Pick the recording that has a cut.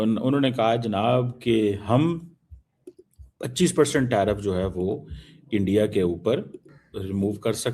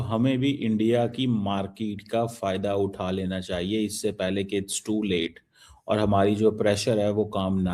first; 1 cut; at 6.8 s

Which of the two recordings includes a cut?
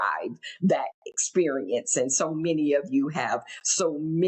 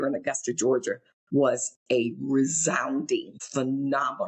second; 1 cut; at 3.4 s

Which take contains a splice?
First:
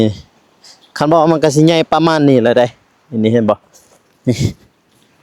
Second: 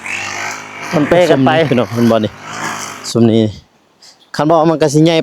second; 1 cut; at 1.7 s

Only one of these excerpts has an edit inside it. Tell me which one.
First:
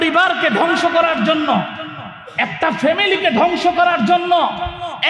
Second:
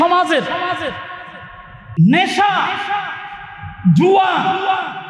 second; 1 cut; at 1.8 s

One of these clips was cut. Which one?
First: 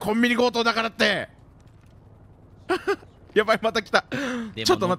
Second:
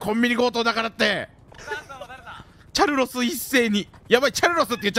second; 2 cuts; at 1.5 s, 3.9 s

